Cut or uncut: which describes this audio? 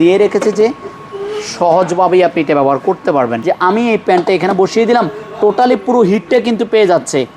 cut